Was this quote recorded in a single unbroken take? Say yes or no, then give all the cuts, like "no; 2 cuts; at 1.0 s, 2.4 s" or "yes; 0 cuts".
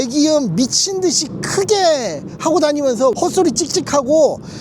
no; 1 cut; at 3.2 s